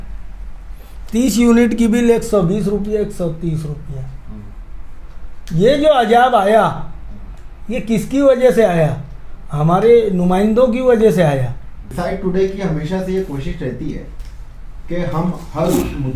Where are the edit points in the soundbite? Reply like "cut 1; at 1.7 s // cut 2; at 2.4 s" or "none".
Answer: cut 1; at 11.8 s